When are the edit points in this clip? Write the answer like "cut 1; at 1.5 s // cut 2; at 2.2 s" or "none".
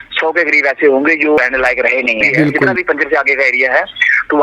cut 1; at 1.4 s // cut 2; at 2.8 s